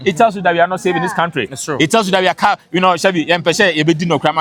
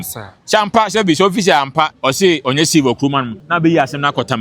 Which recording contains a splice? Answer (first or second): second